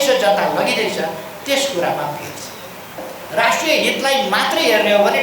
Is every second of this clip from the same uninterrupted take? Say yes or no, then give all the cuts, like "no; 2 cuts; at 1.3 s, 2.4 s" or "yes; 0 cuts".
no; 1 cut; at 3.1 s